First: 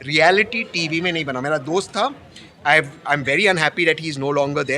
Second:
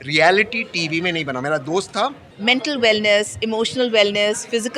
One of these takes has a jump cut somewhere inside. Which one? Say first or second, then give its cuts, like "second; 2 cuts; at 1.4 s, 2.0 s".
second; 1 cut; at 2.3 s